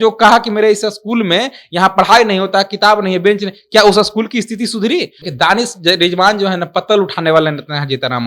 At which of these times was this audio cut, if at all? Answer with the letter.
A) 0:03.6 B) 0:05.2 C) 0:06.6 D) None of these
B